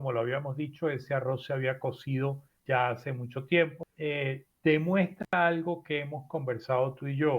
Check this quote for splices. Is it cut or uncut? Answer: cut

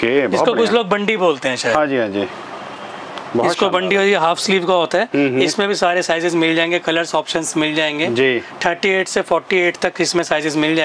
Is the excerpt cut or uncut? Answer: uncut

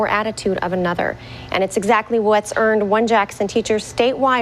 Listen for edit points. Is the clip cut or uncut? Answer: uncut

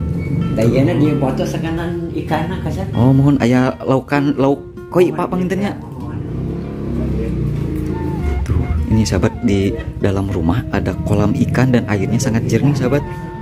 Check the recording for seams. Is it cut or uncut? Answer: uncut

